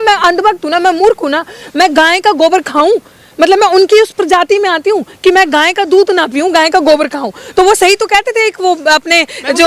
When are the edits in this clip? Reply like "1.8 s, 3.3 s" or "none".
none